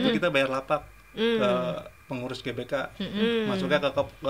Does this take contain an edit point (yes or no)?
no